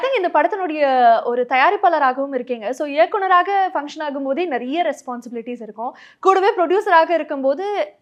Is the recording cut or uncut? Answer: uncut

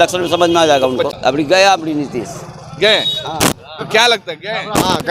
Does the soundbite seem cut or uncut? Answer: cut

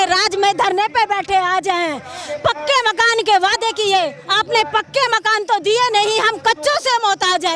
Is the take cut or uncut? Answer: uncut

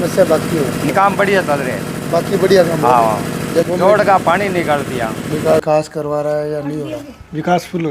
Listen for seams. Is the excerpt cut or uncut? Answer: cut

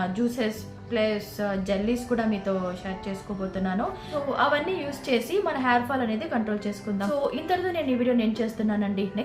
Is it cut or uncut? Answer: uncut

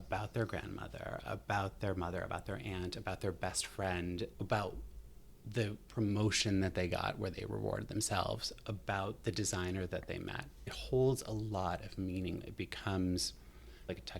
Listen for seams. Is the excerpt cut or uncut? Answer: cut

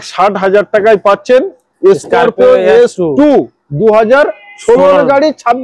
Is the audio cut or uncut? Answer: uncut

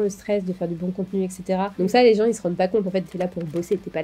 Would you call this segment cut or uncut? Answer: cut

